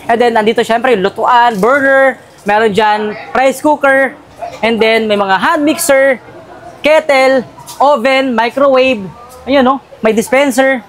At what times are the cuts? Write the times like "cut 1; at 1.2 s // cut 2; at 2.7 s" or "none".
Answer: none